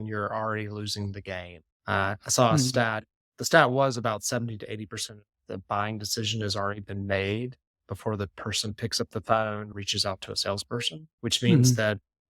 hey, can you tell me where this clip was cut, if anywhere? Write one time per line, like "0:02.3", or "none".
0:09.7
0:11.0